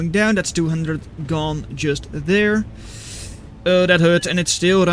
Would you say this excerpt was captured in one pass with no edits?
yes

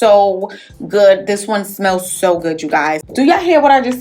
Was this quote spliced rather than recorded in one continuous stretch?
yes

